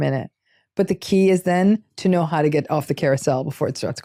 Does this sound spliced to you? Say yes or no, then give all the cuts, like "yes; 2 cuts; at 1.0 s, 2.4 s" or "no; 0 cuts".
no; 0 cuts